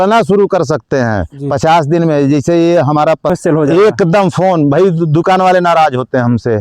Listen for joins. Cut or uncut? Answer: cut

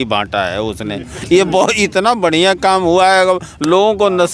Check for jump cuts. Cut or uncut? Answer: uncut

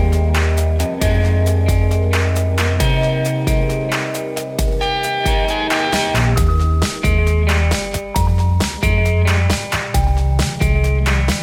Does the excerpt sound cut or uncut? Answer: uncut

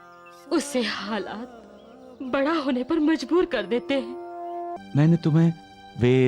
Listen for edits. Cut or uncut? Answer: cut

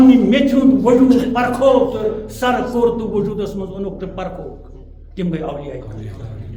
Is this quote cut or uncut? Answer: uncut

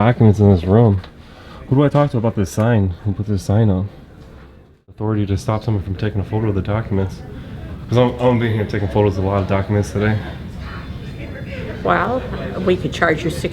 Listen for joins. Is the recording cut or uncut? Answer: cut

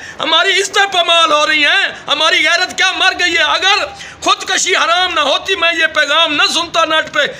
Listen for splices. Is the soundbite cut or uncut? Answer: uncut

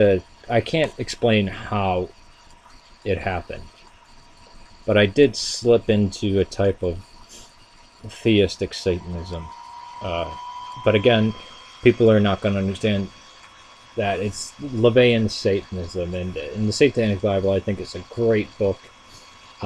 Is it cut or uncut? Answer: cut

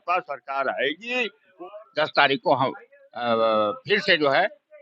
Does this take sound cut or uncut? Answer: cut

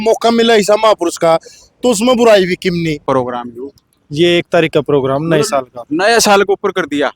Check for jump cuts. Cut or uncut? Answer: cut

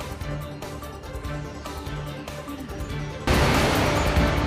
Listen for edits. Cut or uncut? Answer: cut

